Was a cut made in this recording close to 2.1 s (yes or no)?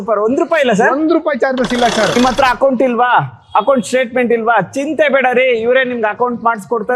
yes